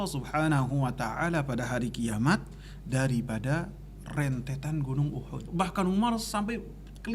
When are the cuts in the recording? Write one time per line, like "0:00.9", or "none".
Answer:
0:05.4

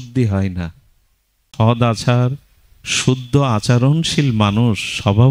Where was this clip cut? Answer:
0:01.5

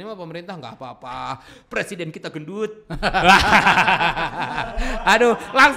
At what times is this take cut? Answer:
none

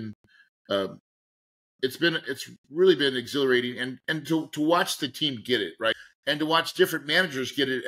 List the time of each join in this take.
0:05.9

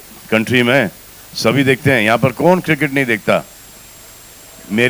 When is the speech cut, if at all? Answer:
none

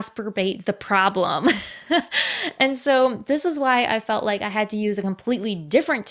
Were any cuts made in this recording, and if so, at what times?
none

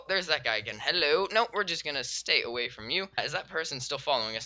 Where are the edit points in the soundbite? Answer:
0:03.2

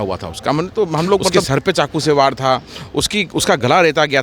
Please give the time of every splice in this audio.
0:01.4

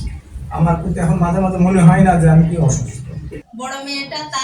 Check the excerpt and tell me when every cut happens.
0:03.4

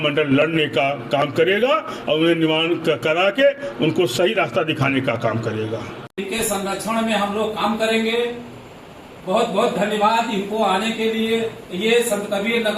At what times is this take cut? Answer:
0:06.0

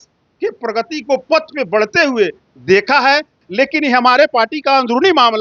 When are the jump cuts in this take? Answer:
0:03.4

